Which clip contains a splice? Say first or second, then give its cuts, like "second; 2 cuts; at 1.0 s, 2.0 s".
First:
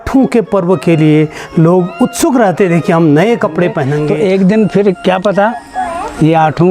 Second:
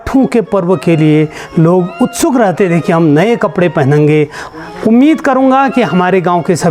first; 1 cut; at 4.0 s